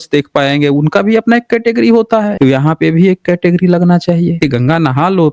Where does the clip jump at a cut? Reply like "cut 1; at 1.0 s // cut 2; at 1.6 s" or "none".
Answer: cut 1; at 2.3 s // cut 2; at 4.4 s